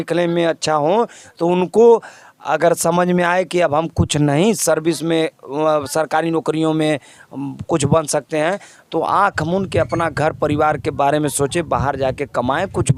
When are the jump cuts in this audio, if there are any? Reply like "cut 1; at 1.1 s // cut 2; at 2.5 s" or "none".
none